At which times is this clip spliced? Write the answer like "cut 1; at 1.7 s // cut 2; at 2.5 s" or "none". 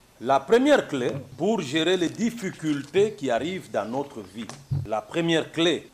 cut 1; at 1.3 s // cut 2; at 4.8 s